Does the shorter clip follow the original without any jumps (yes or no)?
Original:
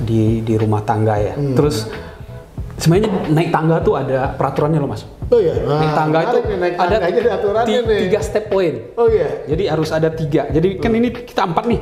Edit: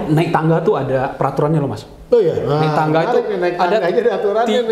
yes